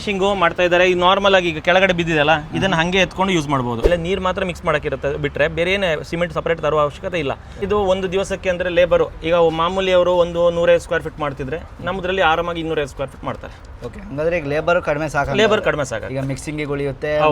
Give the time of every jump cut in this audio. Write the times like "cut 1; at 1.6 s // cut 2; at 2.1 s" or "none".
cut 1; at 3.9 s // cut 2; at 7.7 s